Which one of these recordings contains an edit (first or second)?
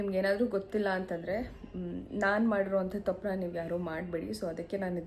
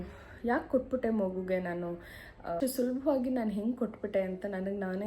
second